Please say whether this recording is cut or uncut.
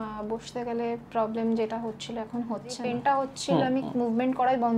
cut